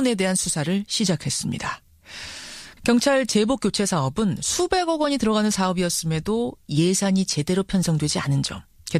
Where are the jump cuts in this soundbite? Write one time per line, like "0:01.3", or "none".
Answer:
none

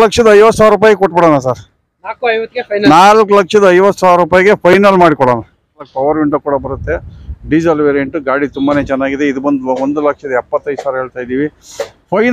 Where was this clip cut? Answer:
0:05.9

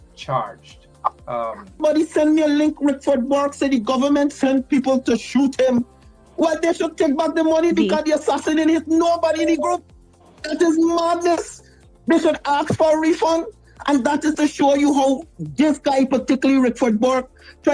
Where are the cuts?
0:01.8

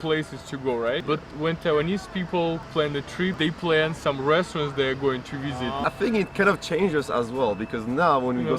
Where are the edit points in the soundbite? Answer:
0:01.0
0:02.8
0:05.8

